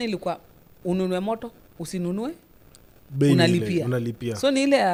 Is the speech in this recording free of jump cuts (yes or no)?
yes